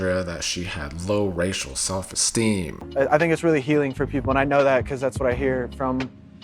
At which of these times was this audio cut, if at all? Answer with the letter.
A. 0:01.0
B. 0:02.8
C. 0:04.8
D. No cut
B